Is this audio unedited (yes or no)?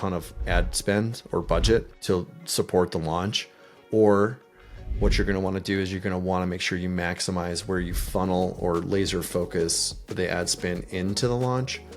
no